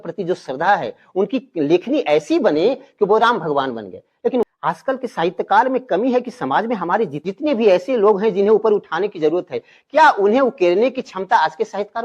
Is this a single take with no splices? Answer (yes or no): yes